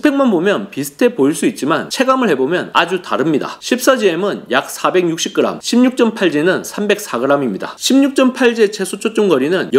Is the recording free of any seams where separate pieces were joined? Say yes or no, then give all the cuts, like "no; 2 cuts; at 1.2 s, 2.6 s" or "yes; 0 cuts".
no; 1 cut; at 7.7 s